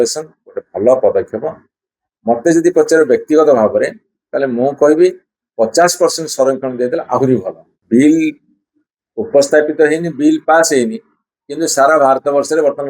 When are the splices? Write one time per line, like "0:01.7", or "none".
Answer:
0:07.7